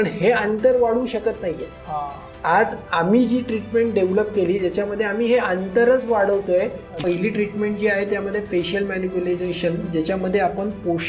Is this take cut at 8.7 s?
no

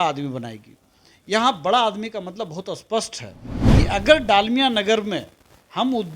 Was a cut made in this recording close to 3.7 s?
yes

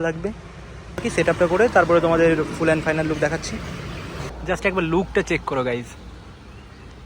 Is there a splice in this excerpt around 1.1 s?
yes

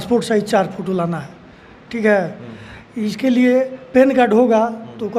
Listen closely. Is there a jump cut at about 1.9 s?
no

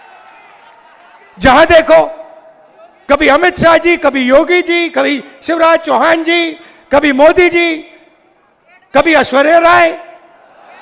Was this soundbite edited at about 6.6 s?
no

